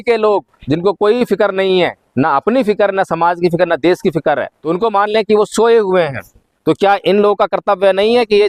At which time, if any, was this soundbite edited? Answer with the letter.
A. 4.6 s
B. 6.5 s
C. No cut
A